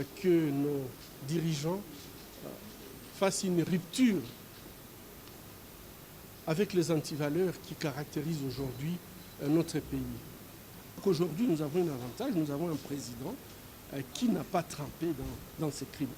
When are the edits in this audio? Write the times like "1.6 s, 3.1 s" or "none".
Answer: 11.0 s